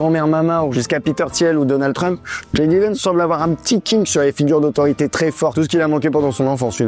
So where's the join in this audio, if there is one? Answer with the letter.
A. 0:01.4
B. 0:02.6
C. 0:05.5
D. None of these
C